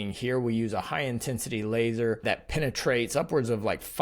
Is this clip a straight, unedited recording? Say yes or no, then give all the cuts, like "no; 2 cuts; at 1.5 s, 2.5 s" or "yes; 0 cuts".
no; 1 cut; at 2.2 s